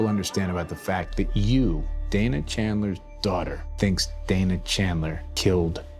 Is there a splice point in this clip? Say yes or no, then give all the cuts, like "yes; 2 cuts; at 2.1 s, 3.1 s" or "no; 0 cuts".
yes; 1 cut; at 3.6 s